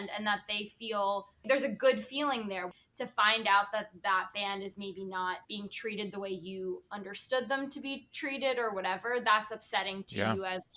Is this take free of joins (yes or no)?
no